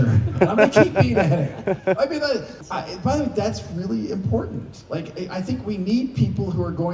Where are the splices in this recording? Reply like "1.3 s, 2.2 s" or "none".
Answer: 2.5 s